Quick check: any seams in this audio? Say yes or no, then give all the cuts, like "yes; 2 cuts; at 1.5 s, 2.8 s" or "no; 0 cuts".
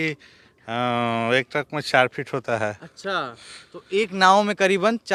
no; 0 cuts